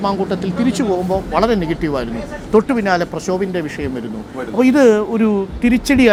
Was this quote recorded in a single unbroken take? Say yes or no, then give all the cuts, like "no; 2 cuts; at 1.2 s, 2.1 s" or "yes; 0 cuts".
yes; 0 cuts